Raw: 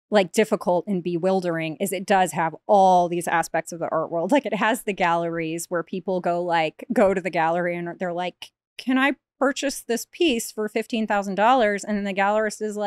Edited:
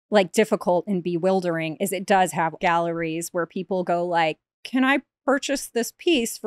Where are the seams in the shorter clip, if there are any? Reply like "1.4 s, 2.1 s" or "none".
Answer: 2.6 s, 4.4 s